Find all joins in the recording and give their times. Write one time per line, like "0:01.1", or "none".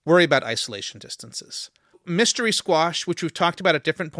0:02.0